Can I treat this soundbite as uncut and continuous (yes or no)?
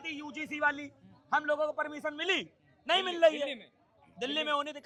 yes